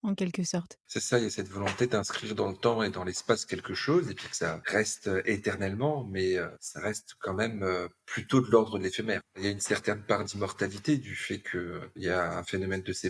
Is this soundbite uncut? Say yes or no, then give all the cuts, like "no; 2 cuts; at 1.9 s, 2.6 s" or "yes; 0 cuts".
no; 5 cuts; at 0.8 s, 4.6 s, 6.6 s, 9.3 s, 11.9 s